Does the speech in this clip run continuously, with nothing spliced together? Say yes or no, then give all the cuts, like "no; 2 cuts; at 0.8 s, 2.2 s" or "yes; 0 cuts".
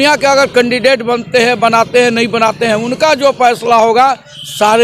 yes; 0 cuts